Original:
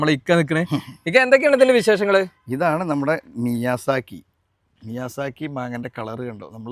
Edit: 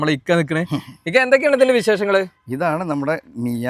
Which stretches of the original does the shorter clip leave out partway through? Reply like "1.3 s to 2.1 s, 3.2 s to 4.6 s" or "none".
none